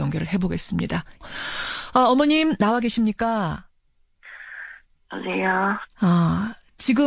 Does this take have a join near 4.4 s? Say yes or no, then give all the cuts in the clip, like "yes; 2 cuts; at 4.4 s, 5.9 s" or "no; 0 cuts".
yes; 1 cut; at 4.4 s